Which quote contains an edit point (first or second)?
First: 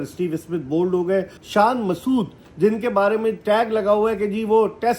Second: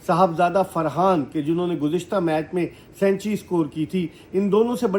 first